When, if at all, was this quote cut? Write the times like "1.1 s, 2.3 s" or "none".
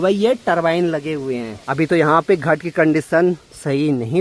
1.6 s